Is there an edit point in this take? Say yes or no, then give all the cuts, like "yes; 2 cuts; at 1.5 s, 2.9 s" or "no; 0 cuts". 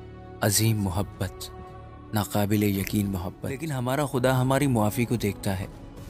yes; 1 cut; at 3.7 s